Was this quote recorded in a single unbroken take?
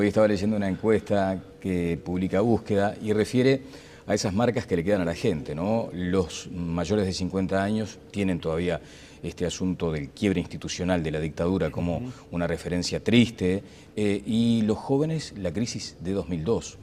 no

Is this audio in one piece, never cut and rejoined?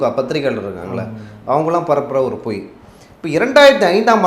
yes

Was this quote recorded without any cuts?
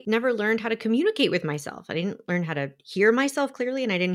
yes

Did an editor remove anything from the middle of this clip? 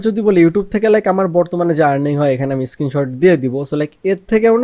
no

